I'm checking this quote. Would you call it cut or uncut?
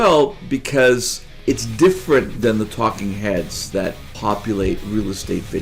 cut